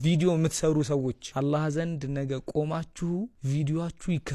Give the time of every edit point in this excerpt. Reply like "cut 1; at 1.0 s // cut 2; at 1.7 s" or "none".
cut 1; at 1.2 s // cut 2; at 3.4 s